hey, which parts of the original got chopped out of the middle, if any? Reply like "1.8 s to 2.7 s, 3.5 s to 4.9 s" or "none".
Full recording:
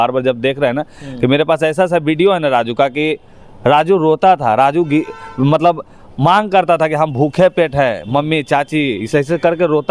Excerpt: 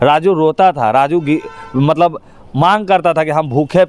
none